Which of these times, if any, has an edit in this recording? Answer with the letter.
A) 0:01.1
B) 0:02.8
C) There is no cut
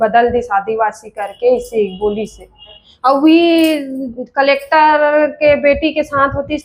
B